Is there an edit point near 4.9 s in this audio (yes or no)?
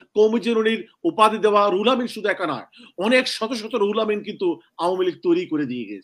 no